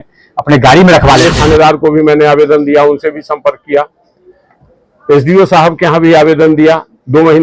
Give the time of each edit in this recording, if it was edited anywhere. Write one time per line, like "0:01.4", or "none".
0:01.3